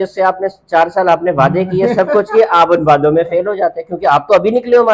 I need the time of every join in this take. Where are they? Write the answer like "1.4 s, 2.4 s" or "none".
none